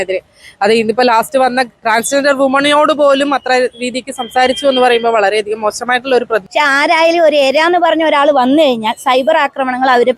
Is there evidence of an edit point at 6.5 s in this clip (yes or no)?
yes